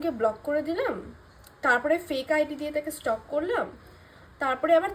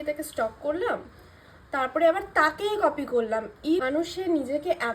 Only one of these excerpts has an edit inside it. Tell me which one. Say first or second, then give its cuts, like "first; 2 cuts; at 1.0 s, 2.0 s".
second; 1 cut; at 3.8 s